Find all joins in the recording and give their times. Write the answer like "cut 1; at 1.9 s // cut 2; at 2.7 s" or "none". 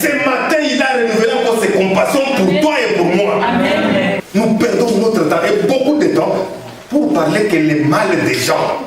cut 1; at 4.2 s